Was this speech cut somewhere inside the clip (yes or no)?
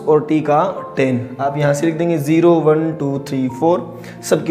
yes